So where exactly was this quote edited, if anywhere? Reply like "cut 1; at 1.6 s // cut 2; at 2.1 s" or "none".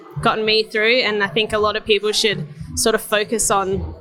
none